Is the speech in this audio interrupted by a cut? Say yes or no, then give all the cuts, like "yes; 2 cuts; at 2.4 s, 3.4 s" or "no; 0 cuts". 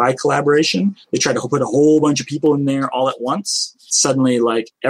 yes; 1 cut; at 3.9 s